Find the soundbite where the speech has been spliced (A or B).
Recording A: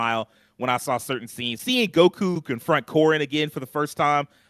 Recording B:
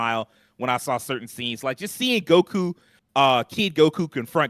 A